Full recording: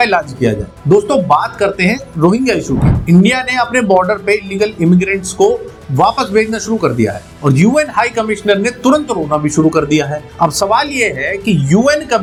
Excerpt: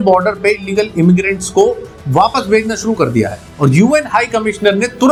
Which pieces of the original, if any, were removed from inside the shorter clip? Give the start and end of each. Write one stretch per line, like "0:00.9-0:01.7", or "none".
none